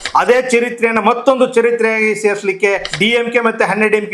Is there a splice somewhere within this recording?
yes; 1 cut; at 2.9 s

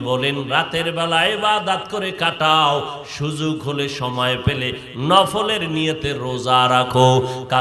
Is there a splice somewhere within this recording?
no; 0 cuts

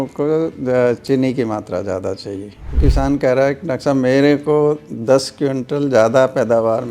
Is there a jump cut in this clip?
yes; 1 cut; at 2.8 s

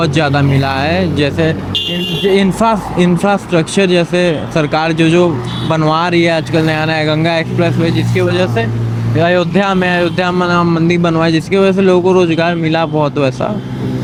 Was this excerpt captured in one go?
yes; 0 cuts

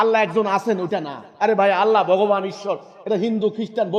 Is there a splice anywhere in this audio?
no; 0 cuts

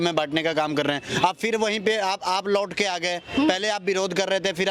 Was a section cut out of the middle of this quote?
no; 0 cuts

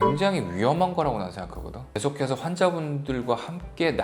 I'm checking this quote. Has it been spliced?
yes; 1 cut; at 1.9 s

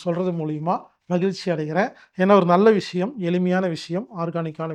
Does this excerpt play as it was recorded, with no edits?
yes; 0 cuts

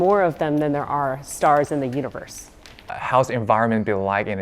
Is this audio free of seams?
no; 1 cut; at 2.7 s

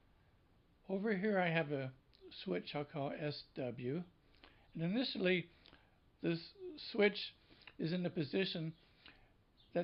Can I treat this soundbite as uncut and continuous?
yes; 0 cuts

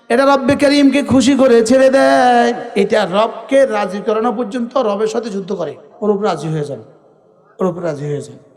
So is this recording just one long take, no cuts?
no; 2 cuts; at 2.6 s, 5.8 s

